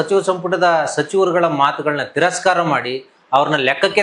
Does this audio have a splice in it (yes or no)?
no